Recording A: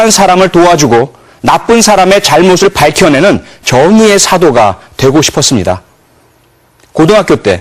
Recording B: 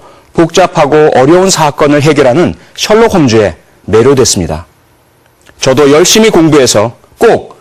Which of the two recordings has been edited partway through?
A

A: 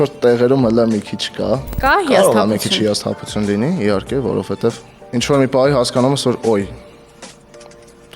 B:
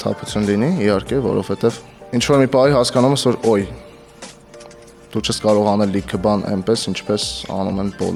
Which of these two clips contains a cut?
A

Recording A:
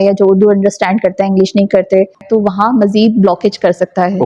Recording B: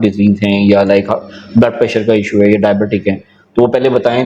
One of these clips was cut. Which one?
A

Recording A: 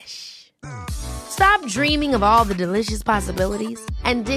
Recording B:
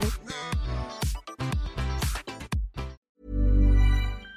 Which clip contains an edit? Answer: B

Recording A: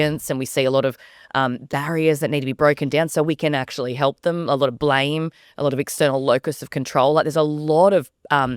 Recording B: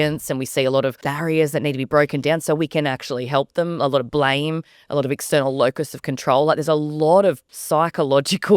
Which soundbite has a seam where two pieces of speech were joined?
B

